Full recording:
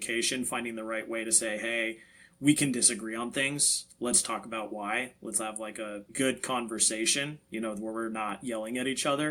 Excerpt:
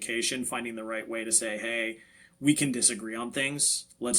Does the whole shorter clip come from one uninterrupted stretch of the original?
yes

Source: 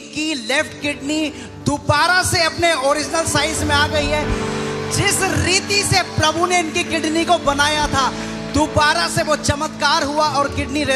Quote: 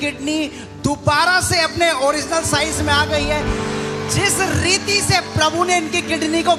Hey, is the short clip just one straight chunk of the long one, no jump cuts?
yes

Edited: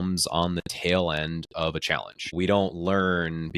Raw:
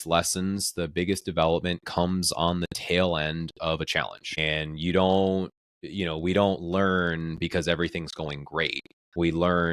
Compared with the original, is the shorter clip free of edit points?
no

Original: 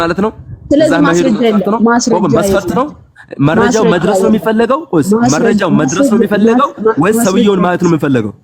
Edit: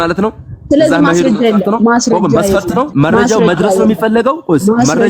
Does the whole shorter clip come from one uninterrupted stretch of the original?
no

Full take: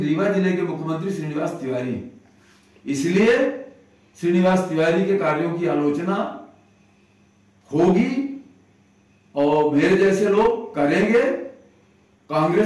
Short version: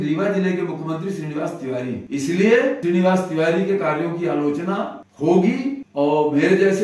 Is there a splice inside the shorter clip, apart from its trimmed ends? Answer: yes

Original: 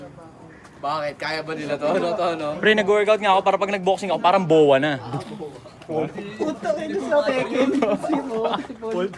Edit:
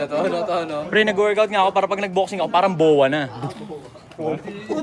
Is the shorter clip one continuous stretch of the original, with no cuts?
yes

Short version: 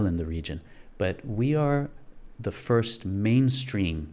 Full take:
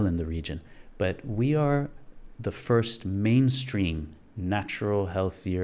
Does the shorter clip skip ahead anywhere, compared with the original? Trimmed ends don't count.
no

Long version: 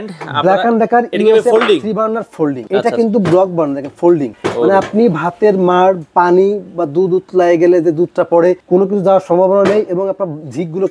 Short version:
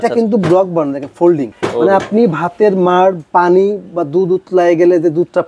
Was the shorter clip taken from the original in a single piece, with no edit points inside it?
yes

